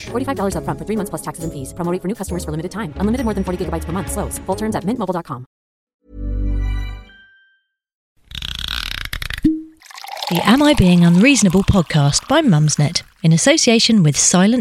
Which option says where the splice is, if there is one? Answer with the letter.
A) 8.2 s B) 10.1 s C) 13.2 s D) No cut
A